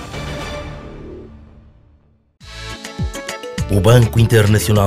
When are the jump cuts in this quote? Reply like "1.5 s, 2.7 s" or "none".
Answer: 2.3 s